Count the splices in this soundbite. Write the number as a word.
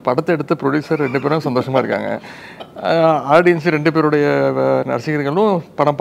zero